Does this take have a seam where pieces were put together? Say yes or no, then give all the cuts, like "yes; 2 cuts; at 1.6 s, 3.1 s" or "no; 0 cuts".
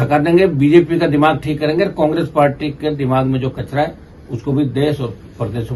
no; 0 cuts